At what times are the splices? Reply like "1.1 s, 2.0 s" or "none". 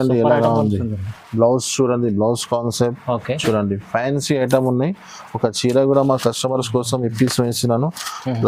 none